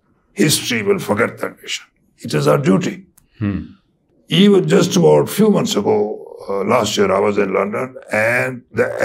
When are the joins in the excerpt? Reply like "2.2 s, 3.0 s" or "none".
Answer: none